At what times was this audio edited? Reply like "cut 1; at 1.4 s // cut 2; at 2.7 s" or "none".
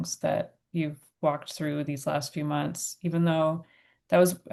none